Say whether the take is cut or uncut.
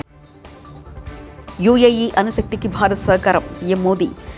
uncut